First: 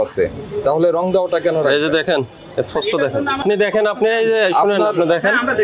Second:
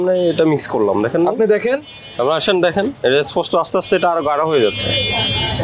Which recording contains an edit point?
first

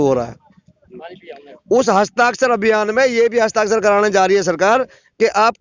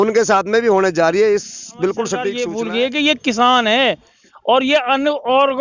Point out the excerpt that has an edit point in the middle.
second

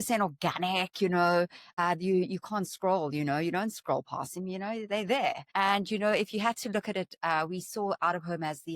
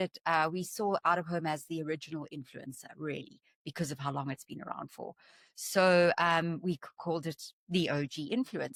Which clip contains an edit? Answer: first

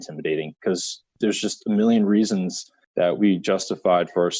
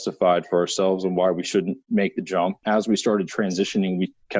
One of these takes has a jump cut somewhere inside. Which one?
second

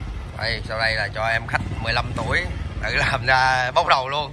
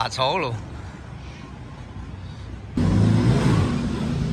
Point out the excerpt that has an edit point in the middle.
second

